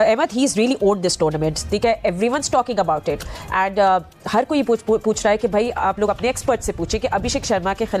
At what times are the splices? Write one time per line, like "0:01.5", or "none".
none